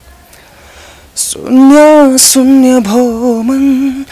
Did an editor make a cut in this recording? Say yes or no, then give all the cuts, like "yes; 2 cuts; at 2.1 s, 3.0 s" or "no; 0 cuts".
no; 0 cuts